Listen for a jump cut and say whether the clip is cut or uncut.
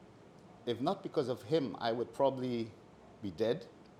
uncut